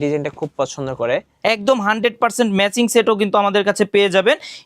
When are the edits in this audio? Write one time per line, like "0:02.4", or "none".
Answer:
0:01.3